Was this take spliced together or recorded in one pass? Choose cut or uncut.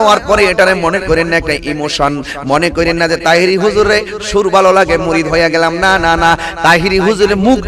uncut